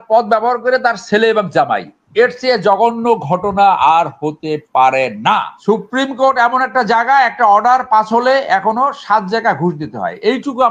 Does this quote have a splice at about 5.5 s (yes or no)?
yes